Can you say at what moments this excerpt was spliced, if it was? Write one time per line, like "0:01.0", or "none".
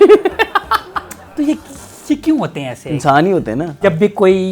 0:01.3
0:03.8